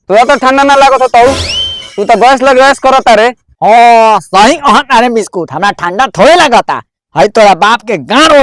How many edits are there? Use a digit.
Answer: 0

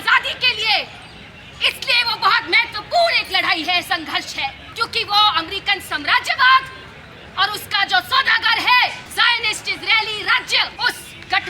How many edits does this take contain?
3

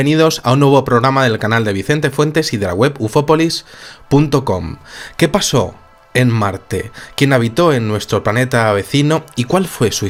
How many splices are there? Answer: 0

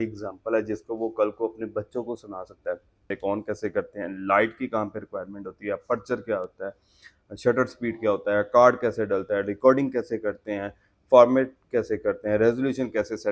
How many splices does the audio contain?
1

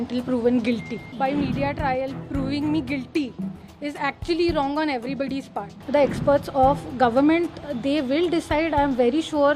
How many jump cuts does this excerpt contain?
2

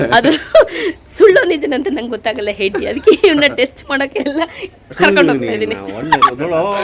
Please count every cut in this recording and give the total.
0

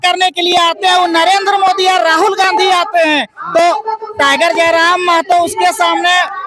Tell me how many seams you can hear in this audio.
0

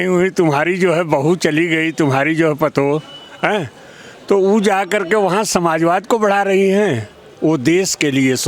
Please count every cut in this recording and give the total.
0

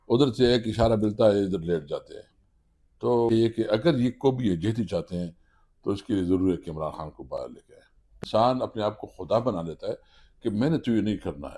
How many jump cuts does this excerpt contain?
2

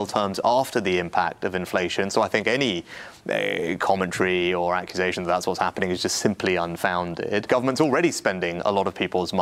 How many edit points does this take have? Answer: 1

